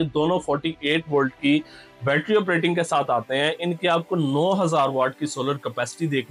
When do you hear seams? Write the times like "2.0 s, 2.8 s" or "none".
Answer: none

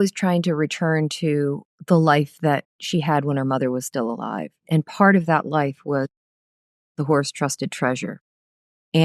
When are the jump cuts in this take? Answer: 1.6 s

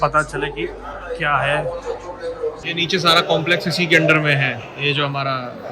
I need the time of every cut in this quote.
2.6 s

